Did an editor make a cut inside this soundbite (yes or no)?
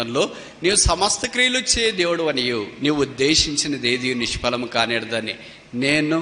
no